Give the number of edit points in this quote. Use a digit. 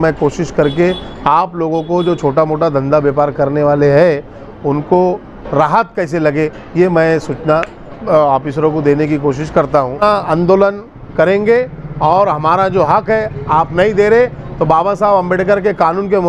1